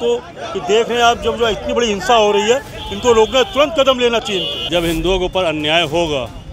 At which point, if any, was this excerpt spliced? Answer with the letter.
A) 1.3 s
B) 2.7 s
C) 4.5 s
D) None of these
C